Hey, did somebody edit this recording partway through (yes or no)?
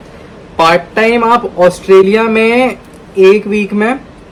no